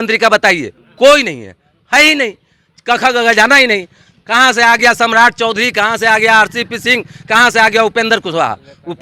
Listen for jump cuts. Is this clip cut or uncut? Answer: uncut